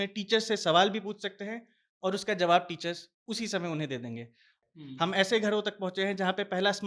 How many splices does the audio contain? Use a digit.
1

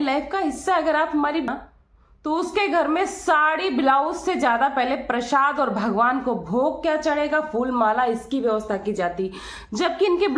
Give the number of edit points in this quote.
1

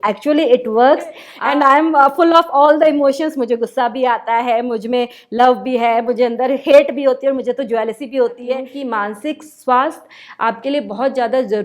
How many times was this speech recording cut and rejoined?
2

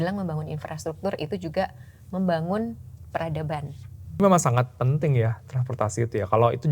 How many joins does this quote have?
1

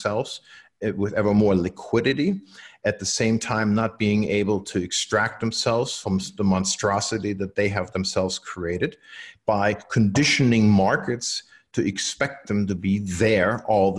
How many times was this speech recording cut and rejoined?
0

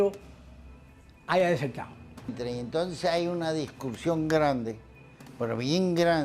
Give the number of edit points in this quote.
1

